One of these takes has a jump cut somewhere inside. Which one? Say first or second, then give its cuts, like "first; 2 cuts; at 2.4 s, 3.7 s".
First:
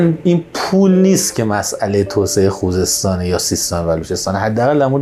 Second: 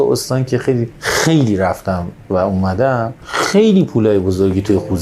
second; 2 cuts; at 1.0 s, 3.2 s